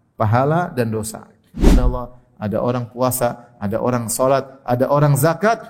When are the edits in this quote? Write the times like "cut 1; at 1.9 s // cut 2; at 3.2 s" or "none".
cut 1; at 1.8 s